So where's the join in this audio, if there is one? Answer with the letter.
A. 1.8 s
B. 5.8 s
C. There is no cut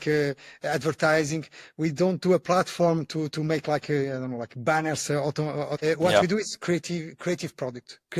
B